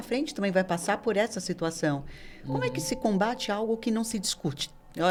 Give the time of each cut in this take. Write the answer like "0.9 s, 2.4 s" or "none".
none